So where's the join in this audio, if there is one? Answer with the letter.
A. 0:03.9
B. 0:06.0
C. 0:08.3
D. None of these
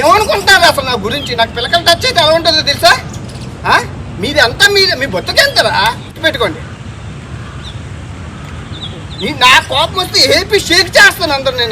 B